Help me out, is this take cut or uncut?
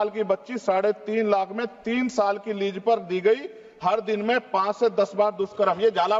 uncut